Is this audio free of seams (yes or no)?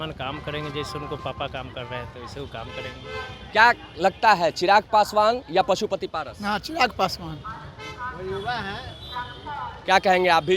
yes